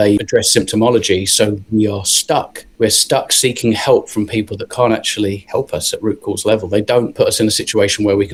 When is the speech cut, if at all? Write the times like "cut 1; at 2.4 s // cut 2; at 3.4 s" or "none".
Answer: none